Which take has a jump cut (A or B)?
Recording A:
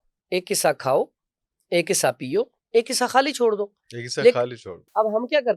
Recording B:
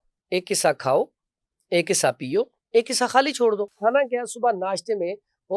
B